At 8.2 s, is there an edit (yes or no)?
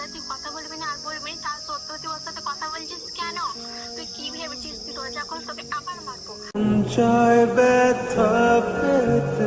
no